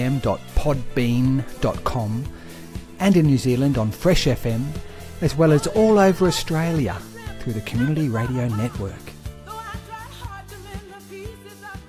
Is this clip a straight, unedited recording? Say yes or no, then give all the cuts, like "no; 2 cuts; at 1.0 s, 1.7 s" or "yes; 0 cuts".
no; 1 cut; at 8.9 s